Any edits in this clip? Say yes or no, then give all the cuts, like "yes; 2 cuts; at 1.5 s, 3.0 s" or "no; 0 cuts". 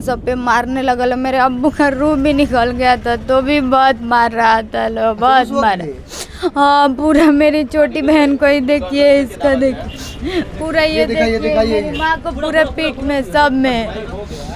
no; 0 cuts